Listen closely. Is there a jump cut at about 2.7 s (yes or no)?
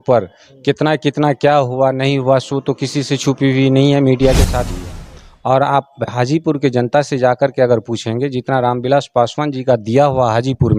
no